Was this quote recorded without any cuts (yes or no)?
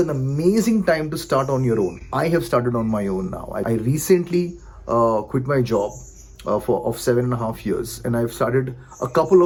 yes